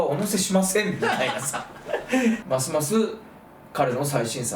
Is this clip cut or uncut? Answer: cut